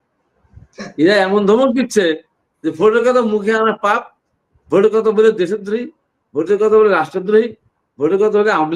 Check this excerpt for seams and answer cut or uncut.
uncut